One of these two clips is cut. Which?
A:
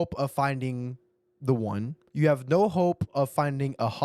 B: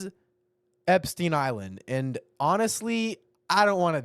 A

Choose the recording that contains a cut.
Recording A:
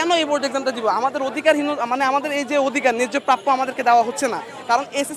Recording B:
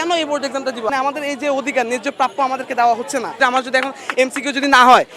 B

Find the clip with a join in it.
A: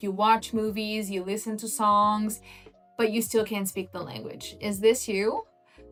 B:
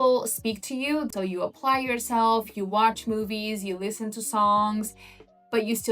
B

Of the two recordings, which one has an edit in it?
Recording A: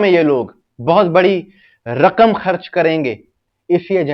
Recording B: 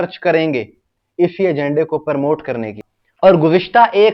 B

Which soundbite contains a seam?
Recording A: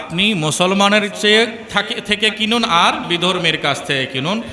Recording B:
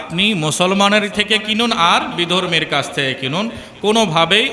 B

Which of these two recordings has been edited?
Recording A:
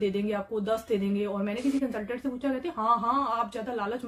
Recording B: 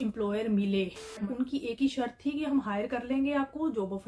B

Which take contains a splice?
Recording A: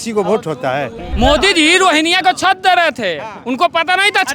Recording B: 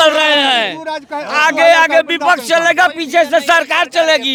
A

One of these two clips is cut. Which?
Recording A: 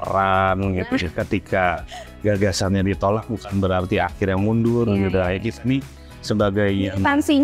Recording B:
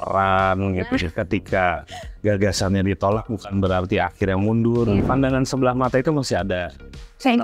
B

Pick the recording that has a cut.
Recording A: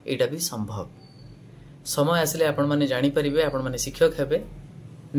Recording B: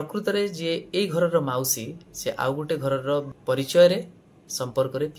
B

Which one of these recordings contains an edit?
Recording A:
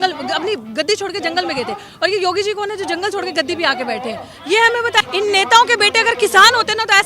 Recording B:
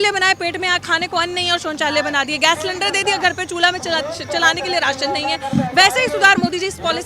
A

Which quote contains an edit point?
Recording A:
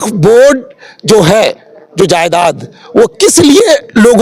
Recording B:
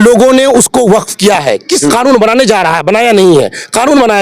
B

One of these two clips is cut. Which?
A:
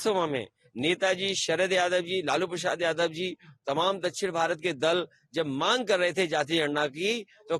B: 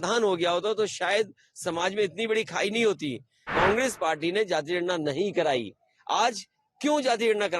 B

